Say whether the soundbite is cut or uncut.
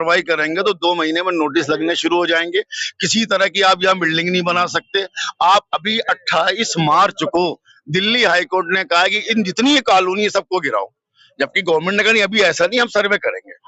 uncut